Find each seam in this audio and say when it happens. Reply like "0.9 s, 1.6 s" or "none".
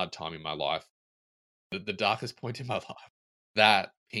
1.4 s